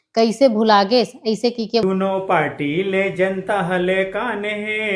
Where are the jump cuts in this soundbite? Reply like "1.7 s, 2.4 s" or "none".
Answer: 1.8 s